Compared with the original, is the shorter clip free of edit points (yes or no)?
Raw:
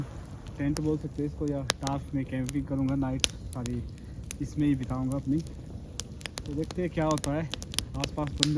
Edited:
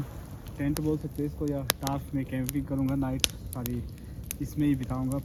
yes